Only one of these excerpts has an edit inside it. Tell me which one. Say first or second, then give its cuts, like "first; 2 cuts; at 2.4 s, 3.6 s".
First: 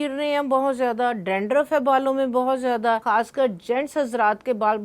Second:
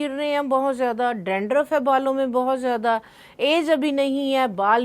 first; 1 cut; at 3.0 s